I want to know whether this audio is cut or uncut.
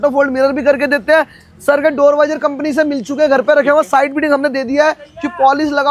uncut